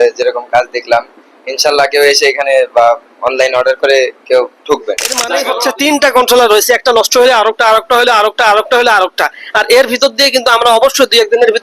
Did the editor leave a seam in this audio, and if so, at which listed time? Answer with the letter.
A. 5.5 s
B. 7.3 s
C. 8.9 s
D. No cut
A